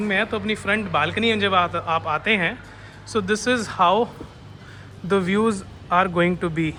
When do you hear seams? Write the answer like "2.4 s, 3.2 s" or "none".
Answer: none